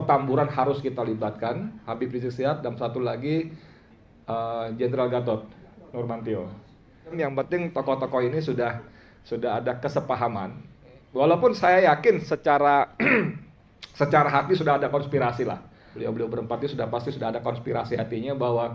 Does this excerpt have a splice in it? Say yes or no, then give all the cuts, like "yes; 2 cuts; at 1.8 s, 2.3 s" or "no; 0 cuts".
yes; 2 cuts; at 7.2 s, 15.9 s